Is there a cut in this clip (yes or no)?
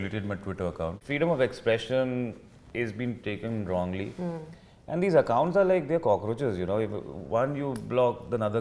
yes